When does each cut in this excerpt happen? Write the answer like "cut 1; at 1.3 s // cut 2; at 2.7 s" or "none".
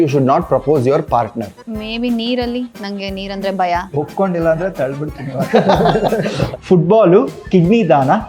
cut 1; at 1.6 s // cut 2; at 6.4 s